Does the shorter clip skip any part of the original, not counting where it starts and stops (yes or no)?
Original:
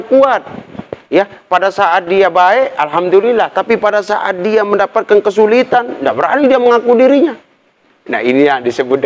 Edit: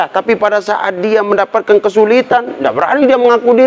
no